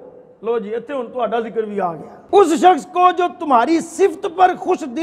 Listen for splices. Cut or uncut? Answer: cut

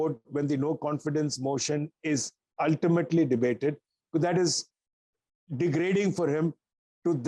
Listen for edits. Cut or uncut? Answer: uncut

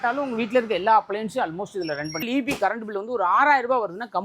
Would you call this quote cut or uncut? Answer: cut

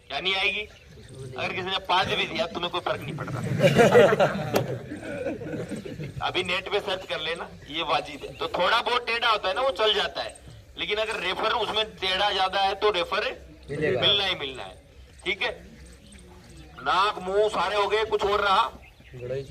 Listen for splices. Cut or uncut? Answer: uncut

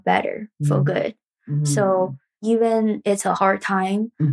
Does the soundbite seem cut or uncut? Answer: cut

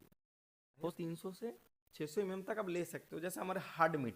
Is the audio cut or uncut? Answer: cut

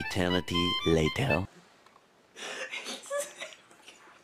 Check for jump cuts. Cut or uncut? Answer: cut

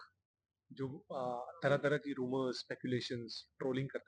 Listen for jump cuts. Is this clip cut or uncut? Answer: uncut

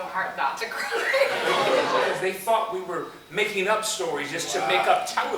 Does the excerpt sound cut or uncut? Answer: cut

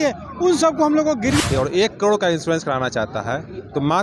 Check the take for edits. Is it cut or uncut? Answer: cut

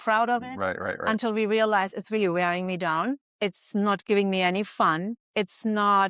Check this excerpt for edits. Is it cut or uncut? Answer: cut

